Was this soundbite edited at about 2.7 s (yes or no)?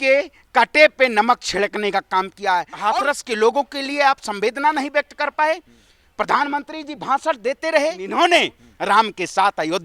yes